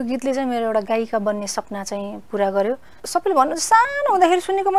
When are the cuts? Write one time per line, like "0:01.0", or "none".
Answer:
0:02.9

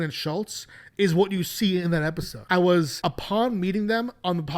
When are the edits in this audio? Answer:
0:02.3
0:02.9

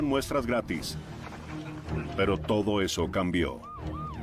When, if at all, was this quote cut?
0:01.4

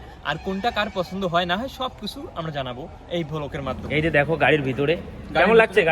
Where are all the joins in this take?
0:03.8

